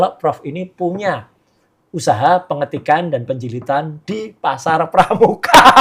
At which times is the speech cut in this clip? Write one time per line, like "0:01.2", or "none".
none